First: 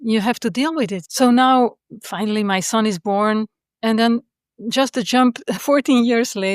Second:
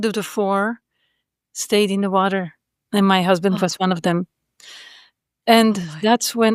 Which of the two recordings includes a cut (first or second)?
first